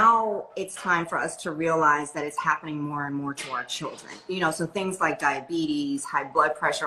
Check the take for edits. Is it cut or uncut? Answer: uncut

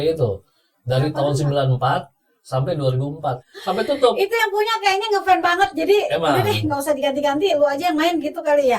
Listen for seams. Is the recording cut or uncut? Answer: cut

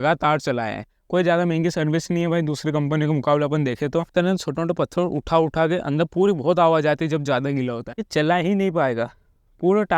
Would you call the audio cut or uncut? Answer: cut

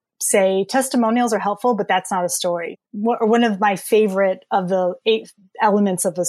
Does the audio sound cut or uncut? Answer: cut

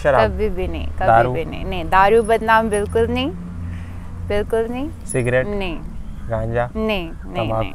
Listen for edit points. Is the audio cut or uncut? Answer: uncut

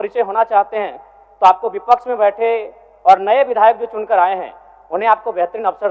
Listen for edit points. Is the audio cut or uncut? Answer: uncut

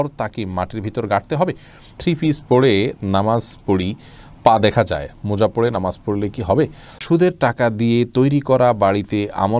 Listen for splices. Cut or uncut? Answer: cut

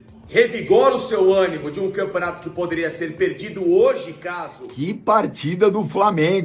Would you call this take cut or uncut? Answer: cut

